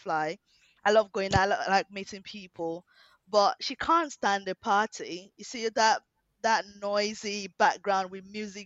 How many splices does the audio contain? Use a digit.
0